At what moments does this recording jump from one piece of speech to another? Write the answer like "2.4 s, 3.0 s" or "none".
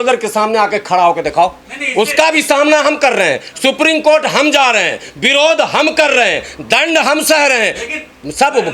none